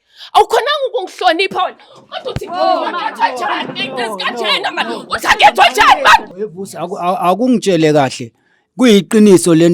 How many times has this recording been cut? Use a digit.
1